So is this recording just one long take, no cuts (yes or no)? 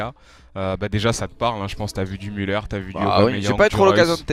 yes